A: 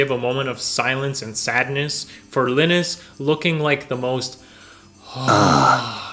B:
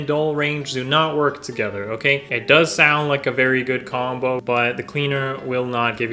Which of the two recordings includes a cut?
B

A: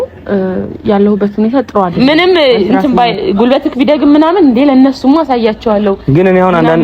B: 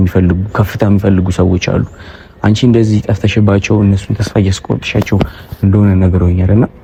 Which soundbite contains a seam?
A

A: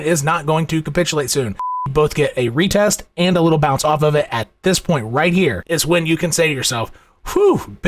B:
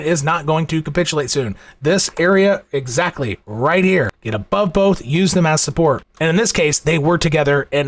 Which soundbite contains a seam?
A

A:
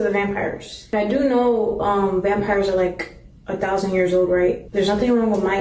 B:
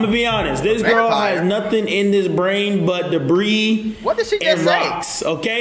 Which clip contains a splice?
A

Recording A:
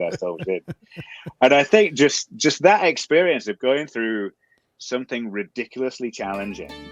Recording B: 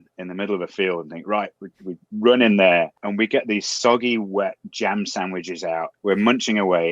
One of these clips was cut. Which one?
B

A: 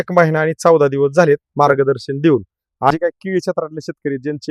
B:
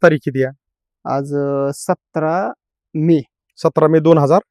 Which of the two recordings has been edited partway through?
A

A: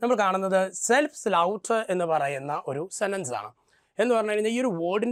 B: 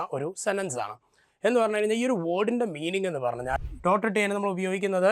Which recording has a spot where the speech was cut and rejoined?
B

